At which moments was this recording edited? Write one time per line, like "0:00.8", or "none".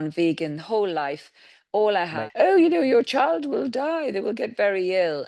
0:02.1